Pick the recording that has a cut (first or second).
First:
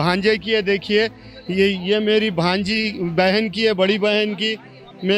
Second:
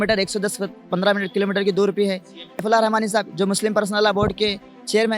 second